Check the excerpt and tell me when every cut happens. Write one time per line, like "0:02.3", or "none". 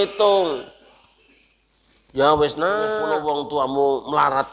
0:03.1